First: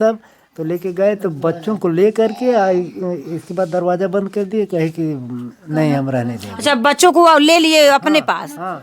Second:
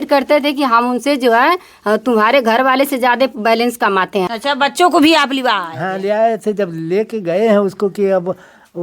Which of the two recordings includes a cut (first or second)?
second